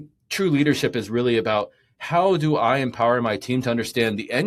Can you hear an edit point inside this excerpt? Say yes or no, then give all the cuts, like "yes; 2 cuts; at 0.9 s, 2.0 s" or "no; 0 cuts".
no; 0 cuts